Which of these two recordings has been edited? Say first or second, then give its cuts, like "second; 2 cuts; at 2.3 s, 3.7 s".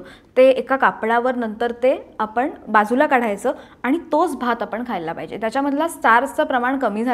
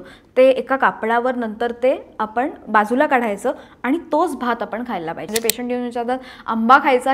second; 1 cut; at 5.2 s